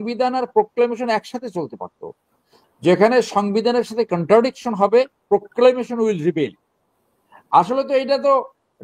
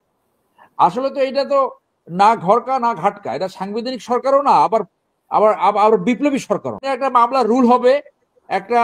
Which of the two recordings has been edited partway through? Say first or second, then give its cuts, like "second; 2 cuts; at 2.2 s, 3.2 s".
second; 1 cut; at 6.8 s